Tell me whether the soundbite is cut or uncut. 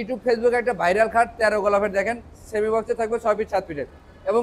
uncut